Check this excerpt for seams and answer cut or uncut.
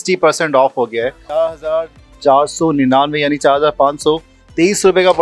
cut